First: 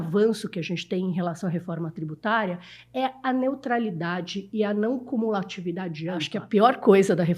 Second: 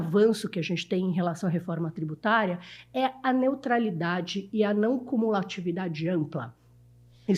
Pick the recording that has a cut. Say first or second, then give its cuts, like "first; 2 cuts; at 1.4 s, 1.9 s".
first; 1 cut; at 6.3 s